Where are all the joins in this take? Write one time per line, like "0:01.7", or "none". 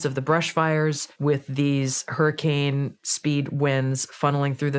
0:01.1